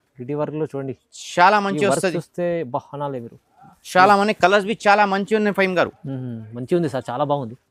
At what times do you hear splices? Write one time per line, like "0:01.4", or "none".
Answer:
none